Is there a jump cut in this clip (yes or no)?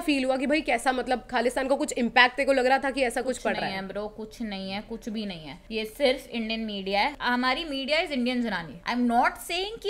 yes